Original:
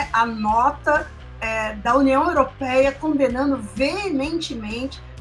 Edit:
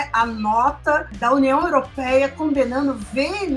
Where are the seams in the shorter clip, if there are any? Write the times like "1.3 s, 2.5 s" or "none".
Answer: 1.1 s